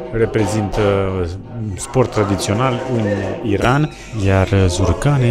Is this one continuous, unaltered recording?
yes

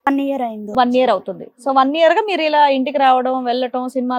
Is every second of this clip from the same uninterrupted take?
yes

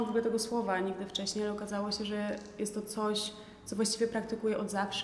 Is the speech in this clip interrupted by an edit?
no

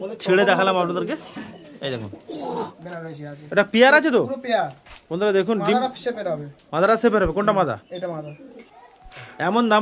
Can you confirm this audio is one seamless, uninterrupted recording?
no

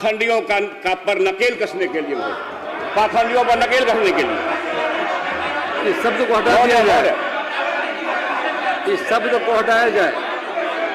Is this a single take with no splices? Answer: yes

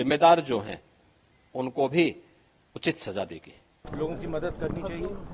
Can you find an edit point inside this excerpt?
yes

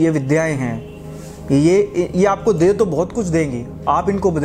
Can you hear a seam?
no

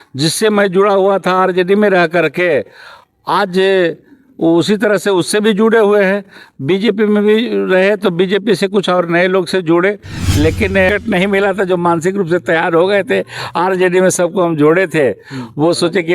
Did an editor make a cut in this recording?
yes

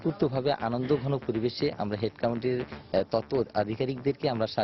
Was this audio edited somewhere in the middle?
no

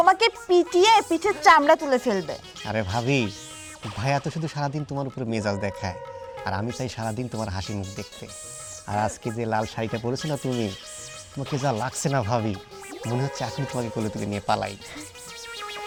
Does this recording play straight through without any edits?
yes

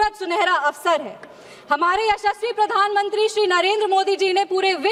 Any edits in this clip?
no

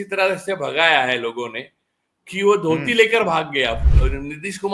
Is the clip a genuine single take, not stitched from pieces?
no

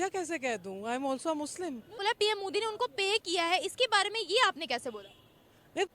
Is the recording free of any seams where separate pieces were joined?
no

